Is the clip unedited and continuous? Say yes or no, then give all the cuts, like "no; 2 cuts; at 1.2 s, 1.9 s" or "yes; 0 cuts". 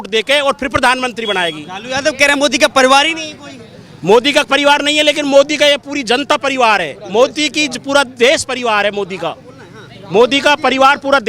yes; 0 cuts